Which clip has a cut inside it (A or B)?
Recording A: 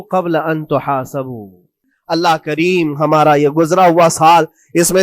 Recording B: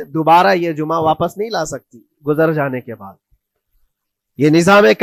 A